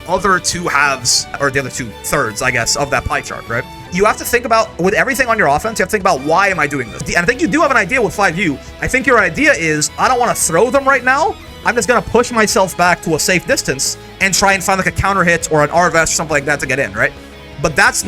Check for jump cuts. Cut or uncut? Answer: cut